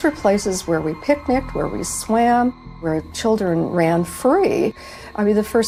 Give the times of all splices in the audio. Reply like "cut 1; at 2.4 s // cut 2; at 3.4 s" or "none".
none